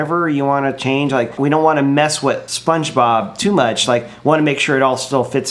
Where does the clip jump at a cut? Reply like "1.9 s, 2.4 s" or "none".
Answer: 1.3 s